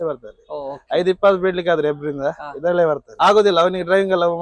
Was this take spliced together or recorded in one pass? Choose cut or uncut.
cut